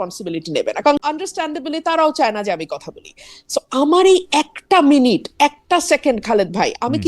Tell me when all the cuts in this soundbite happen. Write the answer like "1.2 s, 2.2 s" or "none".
1.0 s